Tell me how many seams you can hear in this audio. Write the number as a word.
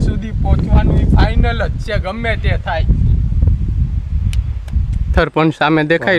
one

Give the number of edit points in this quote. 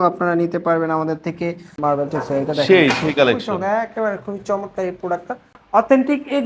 two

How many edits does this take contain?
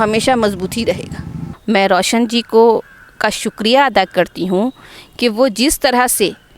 one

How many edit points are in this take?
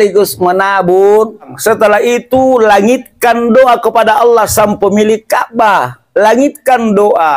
one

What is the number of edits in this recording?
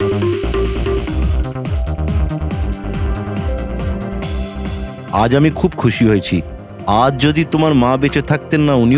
one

